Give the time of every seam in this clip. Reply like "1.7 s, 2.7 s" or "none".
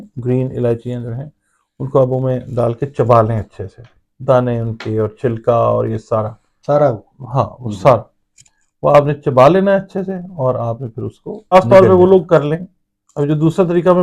11.5 s